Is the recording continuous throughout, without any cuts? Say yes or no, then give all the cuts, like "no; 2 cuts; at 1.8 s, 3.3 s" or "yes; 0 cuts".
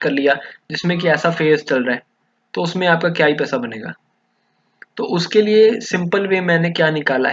yes; 0 cuts